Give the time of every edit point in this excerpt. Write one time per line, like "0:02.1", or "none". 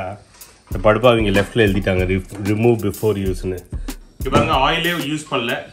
0:04.0